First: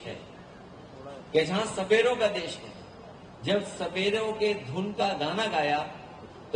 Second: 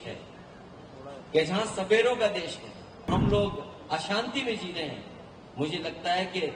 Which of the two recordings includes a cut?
second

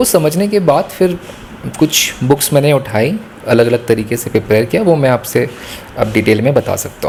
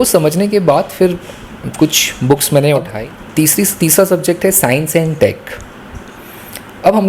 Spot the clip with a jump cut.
second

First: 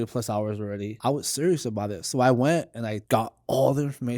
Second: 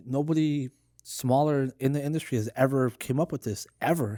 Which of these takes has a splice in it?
first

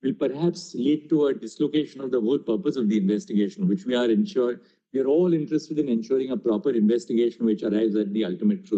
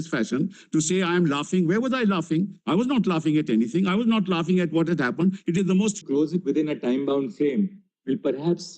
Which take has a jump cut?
second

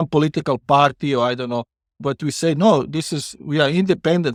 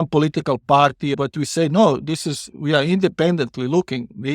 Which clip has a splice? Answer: second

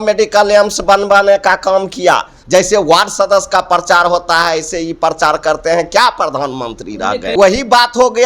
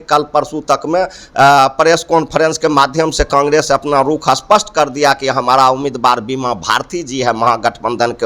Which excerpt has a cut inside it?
first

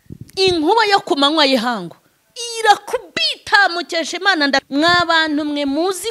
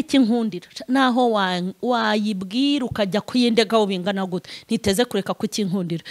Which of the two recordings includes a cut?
first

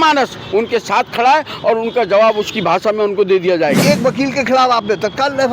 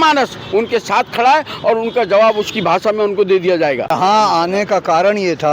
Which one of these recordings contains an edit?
first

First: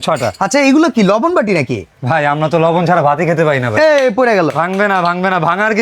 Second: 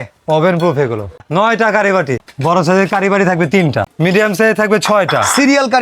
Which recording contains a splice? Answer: second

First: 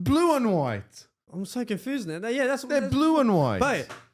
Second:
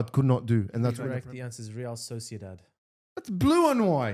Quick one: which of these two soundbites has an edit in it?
second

